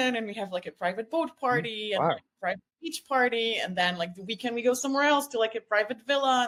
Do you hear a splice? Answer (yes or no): no